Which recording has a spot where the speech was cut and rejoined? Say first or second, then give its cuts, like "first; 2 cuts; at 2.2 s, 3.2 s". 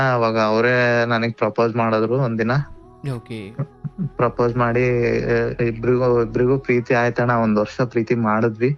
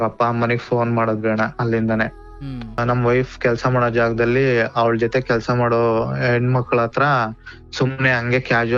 second; 1 cut; at 2.8 s